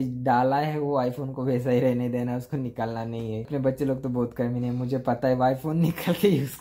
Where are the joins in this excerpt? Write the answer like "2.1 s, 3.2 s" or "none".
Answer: 3.5 s